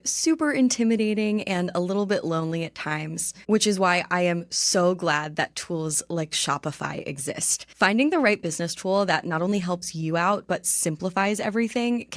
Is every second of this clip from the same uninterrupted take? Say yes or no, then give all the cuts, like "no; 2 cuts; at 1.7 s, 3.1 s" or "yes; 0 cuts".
no; 2 cuts; at 3.3 s, 7.6 s